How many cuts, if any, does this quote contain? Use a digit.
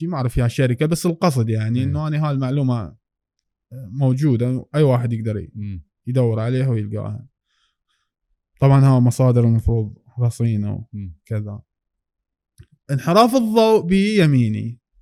0